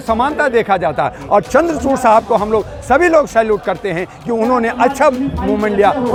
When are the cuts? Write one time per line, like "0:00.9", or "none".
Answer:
none